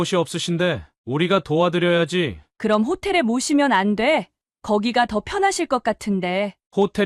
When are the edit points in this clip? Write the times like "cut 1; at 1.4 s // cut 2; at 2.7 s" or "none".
none

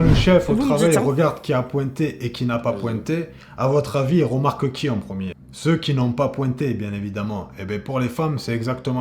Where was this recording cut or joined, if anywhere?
cut 1; at 5.5 s

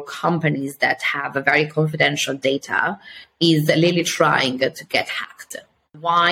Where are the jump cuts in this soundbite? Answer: none

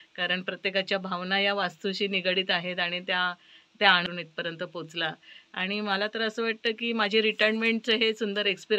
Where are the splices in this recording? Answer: cut 1; at 4.1 s

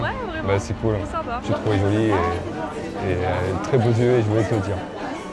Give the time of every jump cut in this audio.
cut 1; at 1.4 s

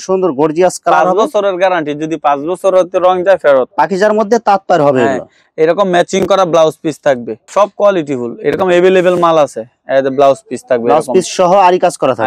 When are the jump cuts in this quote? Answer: cut 1; at 3.7 s // cut 2; at 7.5 s

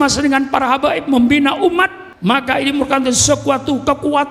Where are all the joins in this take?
cut 1; at 2.0 s

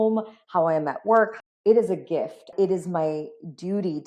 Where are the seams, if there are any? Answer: cut 1; at 1.4 s // cut 2; at 2.5 s

